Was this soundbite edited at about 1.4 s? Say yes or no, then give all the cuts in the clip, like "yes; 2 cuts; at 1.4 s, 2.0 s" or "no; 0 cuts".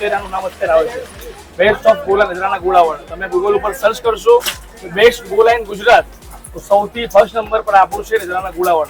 no; 0 cuts